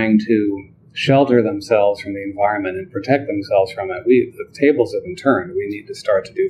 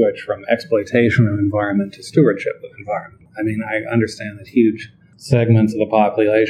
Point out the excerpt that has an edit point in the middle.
second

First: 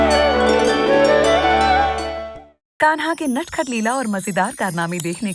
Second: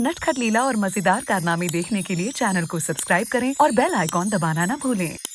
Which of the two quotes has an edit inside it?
first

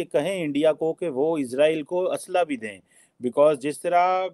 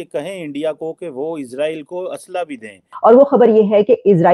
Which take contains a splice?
second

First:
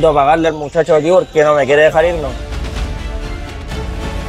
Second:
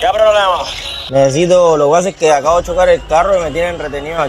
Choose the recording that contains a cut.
first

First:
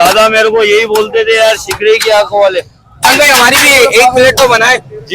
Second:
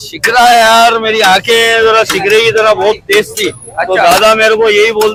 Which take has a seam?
first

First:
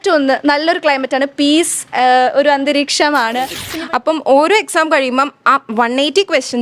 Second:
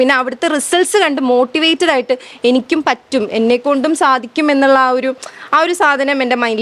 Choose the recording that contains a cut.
first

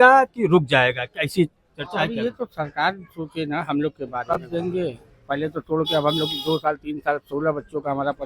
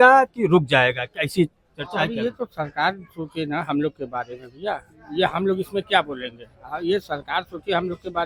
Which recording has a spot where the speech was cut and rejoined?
first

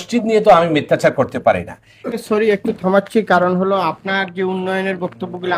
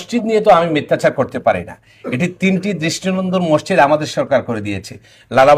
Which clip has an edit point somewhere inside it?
first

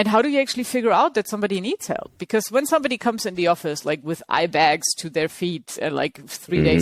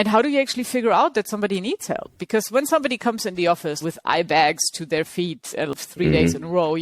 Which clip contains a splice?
second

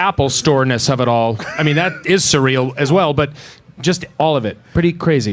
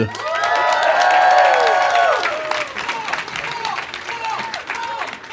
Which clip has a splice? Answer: first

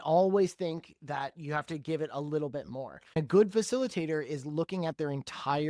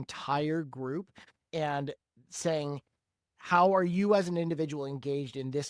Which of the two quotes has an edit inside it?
first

